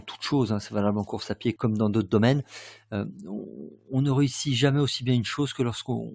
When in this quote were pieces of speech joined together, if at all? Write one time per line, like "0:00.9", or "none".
0:01.6